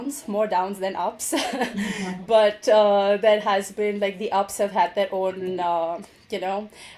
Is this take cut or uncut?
uncut